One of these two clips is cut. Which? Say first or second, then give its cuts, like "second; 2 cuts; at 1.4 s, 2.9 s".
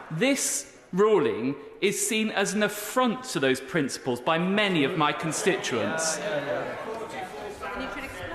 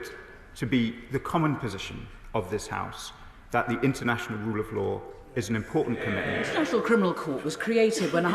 second; 1 cut; at 6.5 s